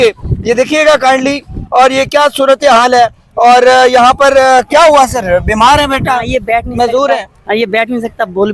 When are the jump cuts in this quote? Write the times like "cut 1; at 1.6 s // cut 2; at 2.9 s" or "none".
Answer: none